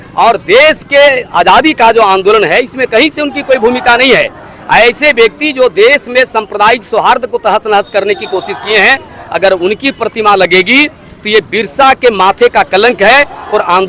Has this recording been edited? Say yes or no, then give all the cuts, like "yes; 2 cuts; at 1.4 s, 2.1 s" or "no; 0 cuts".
no; 0 cuts